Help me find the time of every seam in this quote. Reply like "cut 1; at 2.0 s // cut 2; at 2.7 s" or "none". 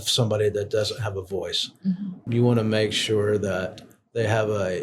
cut 1; at 2.2 s

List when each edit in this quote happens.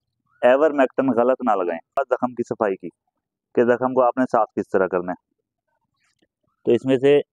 cut 1; at 2.0 s

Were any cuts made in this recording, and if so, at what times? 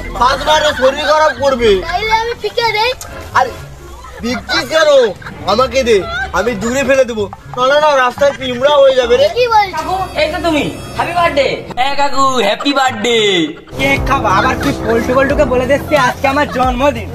cut 1; at 9.8 s // cut 2; at 13.8 s

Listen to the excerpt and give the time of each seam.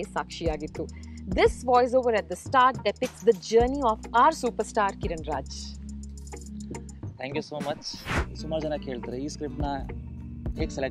cut 1; at 8.2 s

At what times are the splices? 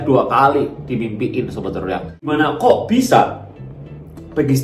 cut 1; at 2.3 s

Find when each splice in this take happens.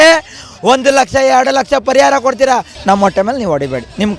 cut 1; at 2.7 s

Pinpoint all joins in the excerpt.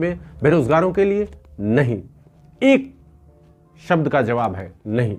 none

